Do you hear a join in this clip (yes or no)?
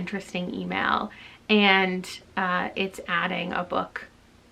no